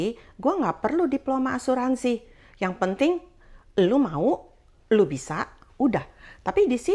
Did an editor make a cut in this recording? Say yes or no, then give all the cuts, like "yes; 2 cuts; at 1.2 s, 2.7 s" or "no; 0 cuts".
no; 0 cuts